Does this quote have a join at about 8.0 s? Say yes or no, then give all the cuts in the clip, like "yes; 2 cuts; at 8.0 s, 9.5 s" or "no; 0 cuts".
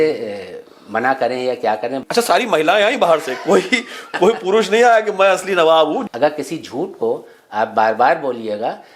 no; 2 cuts; at 2.0 s, 6.0 s